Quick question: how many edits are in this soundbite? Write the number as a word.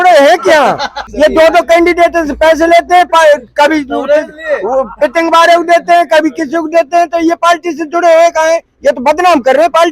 one